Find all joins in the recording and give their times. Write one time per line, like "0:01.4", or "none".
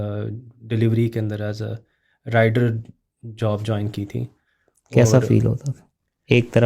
none